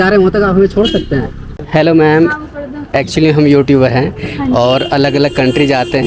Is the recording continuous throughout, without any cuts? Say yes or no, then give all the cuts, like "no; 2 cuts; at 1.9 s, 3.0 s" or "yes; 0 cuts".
no; 1 cut; at 1.6 s